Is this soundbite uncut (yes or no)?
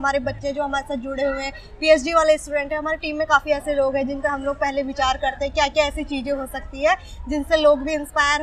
yes